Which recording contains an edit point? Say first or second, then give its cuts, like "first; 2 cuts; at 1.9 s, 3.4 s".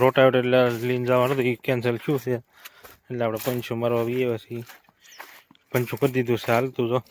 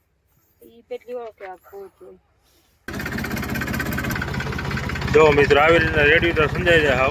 second; 1 cut; at 2.9 s